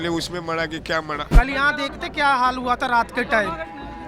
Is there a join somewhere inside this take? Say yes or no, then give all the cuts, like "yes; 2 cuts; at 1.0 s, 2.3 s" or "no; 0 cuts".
yes; 1 cut; at 1.2 s